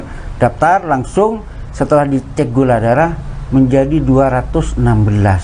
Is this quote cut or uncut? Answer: uncut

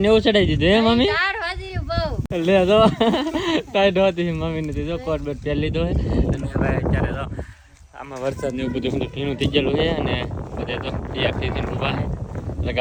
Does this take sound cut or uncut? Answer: uncut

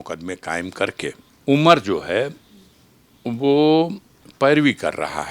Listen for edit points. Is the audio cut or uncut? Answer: cut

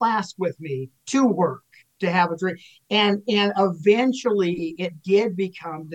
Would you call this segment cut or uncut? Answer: uncut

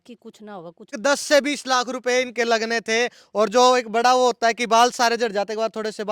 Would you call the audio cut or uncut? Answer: cut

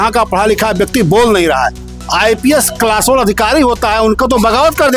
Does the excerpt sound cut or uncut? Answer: uncut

